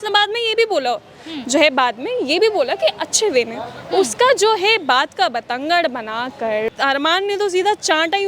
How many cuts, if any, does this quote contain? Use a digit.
1